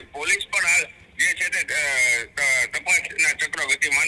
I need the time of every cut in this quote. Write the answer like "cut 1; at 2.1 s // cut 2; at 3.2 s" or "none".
none